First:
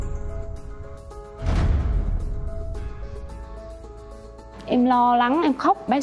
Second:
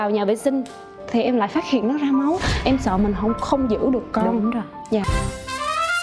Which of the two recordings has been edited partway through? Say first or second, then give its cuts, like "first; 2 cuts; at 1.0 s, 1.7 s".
second; 1 cut; at 5.1 s